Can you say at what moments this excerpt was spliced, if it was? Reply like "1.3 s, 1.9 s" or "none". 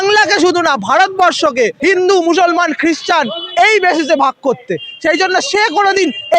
1.8 s